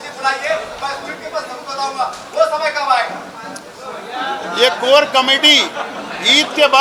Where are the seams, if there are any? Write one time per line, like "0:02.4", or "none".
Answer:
none